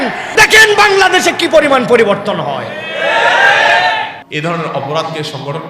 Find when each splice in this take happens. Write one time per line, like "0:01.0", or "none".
0:04.2